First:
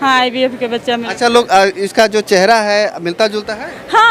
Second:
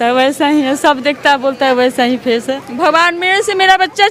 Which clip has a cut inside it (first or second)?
second